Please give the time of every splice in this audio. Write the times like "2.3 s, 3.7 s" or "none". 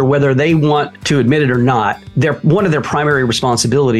1.0 s, 2.0 s